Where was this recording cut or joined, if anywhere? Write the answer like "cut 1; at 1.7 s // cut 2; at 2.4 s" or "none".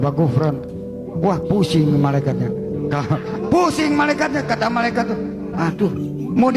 cut 1; at 3.1 s